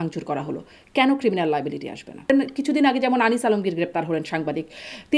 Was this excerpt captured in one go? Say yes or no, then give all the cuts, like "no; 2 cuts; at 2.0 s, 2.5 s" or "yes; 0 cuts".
no; 1 cut; at 2.3 s